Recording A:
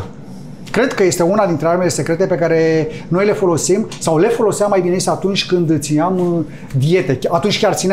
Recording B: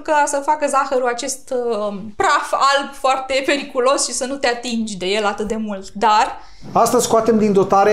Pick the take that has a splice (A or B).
B